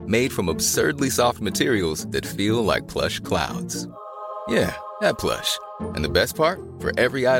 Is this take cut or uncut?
uncut